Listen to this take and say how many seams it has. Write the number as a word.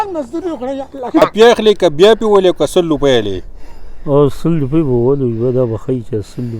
one